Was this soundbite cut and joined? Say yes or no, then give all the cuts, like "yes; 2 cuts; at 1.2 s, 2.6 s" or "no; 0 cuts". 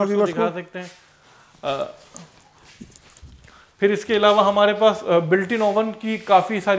no; 0 cuts